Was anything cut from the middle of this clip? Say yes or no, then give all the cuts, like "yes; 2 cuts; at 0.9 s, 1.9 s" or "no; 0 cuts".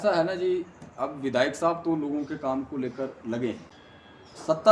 yes; 1 cut; at 3.7 s